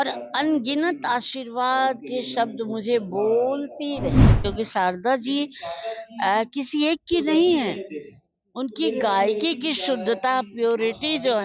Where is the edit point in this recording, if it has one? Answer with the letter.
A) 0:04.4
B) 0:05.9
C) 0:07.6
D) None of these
A